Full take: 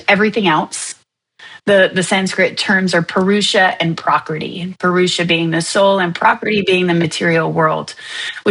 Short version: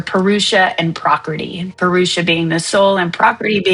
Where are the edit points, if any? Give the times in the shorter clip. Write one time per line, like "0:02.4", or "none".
none